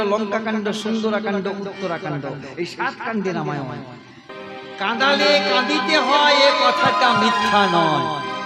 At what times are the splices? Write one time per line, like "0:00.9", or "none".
0:04.2